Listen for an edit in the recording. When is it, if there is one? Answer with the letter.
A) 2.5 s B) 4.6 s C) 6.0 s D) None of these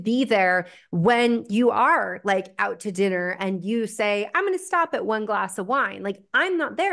D